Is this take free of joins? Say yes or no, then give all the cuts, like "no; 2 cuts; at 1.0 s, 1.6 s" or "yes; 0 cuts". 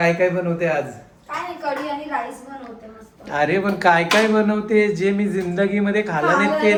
yes; 0 cuts